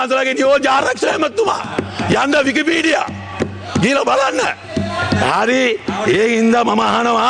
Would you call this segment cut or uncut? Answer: uncut